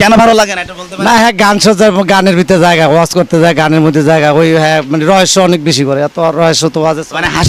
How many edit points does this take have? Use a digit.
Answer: 0